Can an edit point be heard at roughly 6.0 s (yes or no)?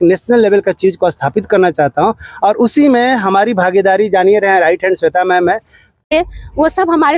yes